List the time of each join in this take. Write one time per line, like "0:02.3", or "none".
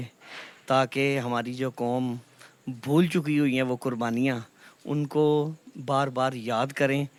none